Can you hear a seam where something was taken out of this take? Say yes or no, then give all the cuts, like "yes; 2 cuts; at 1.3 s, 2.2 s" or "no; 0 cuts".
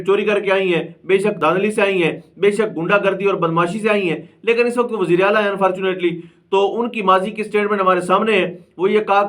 no; 0 cuts